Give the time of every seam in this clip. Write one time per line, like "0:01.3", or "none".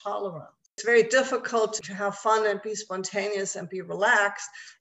0:00.8
0:01.8